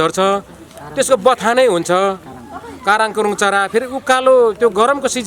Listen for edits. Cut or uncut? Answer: uncut